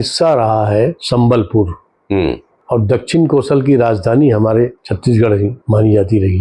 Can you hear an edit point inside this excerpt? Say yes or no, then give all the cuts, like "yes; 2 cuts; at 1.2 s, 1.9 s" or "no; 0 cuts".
yes; 3 cuts; at 1.0 s, 2.5 s, 5.3 s